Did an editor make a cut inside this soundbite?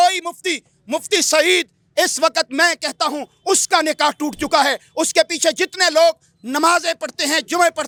no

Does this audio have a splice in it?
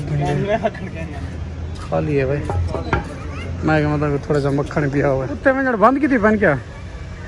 yes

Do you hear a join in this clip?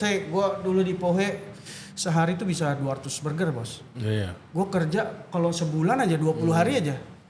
no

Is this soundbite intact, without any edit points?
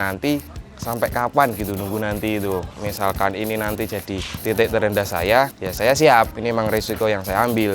no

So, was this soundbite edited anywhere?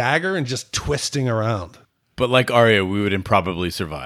yes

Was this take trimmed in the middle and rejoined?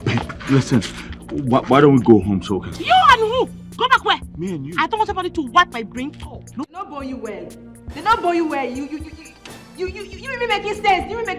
yes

